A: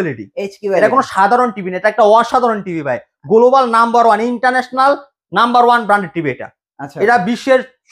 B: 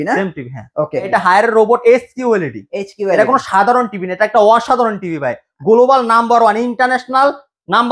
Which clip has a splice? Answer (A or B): B